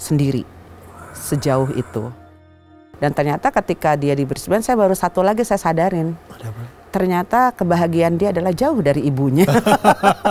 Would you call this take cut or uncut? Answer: cut